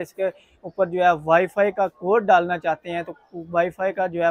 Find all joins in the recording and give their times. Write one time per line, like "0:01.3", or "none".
none